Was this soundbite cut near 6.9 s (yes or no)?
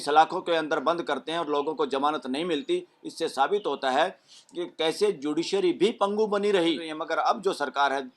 yes